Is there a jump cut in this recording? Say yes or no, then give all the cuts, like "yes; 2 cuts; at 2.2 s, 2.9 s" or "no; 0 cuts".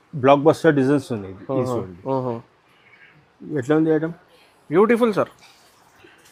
no; 0 cuts